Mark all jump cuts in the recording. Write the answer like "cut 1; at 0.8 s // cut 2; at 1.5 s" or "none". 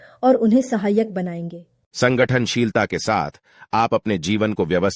cut 1; at 1.8 s

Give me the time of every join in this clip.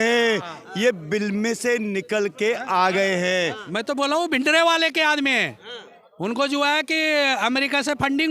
cut 1; at 3.6 s

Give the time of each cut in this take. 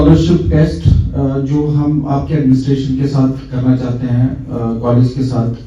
none

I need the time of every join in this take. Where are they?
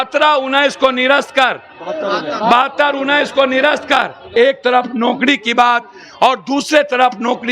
cut 1; at 4.3 s

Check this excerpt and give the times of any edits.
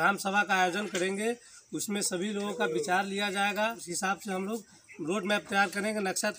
cut 1; at 3.9 s

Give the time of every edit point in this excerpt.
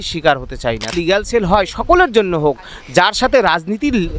cut 1; at 0.9 s

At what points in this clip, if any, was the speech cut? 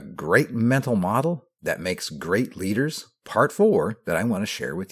none

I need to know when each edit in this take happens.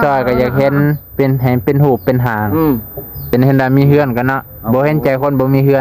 cut 1; at 3.3 s

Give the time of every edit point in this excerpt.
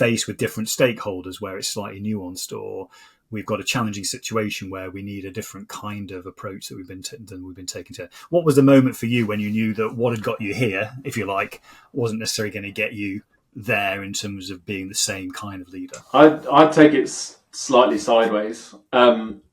none

